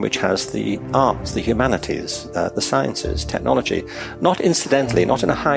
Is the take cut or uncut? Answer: uncut